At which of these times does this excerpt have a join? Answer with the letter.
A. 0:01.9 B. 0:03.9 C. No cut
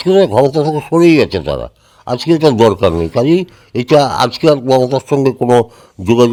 C